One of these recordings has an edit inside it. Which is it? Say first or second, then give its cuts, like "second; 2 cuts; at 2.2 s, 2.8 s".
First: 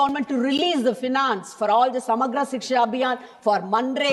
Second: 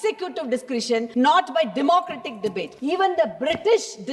second; 2 cuts; at 1.1 s, 2.7 s